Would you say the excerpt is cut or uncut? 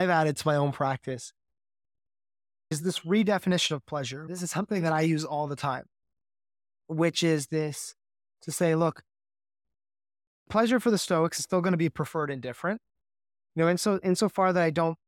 cut